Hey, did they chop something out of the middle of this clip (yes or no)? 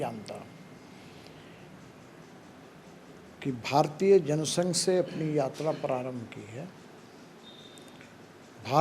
no